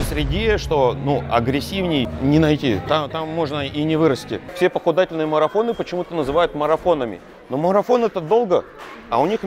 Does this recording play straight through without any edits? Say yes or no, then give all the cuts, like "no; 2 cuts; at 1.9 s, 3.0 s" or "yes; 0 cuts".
no; 2 cuts; at 2.1 s, 4.4 s